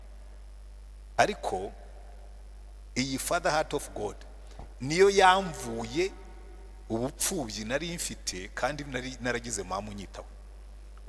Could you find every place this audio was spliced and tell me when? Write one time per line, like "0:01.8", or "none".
none